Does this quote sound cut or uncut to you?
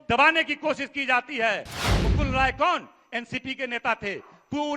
cut